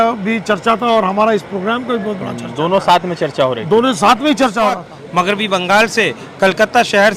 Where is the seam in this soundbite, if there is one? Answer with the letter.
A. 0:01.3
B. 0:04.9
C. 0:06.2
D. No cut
B